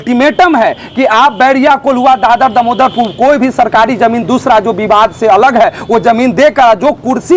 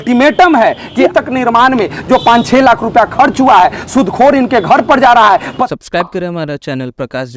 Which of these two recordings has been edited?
second; 2 cuts; at 1.1 s, 5.6 s

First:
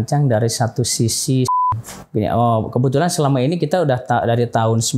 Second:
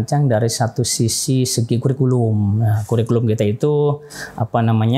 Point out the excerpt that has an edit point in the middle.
first; 1 cut; at 1.5 s

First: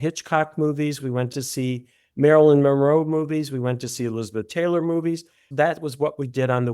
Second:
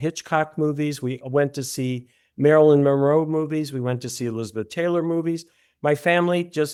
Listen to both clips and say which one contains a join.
first; 2 cuts; at 1.3 s, 5.5 s

